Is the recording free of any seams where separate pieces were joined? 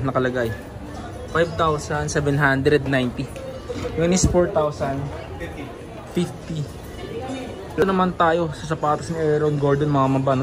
no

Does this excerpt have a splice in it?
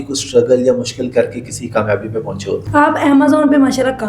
yes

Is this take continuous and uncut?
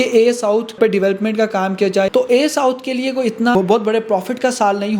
no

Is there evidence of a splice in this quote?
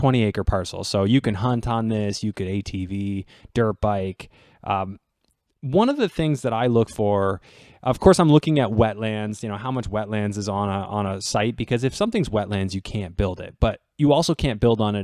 no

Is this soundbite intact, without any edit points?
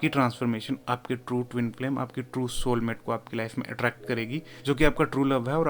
no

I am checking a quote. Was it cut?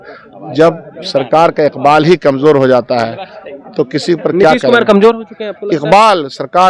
no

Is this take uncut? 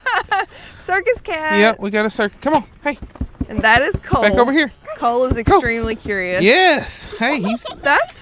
yes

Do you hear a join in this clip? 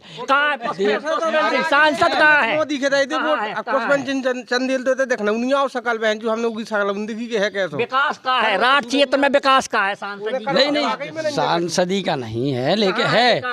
no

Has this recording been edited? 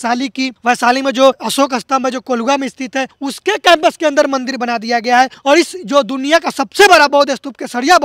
no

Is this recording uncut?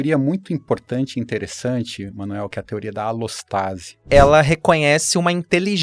no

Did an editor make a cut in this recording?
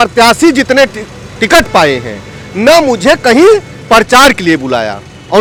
no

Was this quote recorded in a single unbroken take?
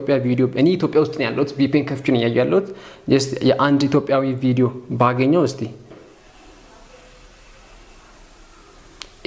no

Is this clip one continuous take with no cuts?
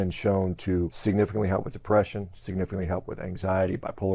no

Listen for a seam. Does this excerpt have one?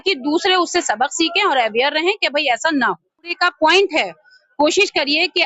yes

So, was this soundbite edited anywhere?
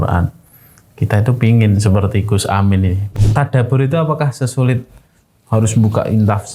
yes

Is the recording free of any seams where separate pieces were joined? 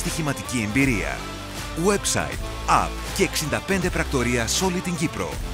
yes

